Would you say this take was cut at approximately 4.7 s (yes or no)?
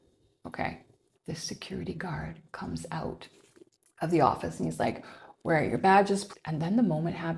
no